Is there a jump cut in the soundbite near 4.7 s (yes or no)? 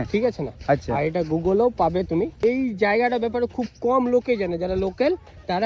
no